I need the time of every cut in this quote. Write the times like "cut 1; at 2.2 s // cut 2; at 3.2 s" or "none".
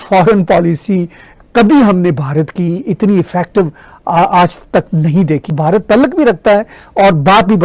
cut 1; at 5.5 s